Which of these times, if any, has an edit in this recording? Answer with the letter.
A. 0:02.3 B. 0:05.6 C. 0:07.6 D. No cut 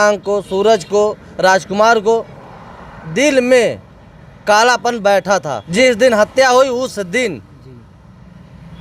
B